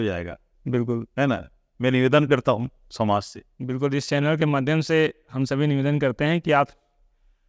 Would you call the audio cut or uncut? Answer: uncut